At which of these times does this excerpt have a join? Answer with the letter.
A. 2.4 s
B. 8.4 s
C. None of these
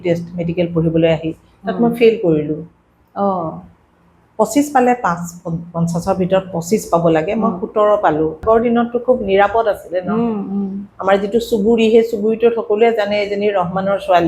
B